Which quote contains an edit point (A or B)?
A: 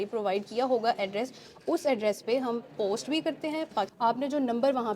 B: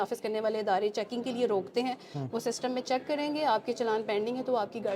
A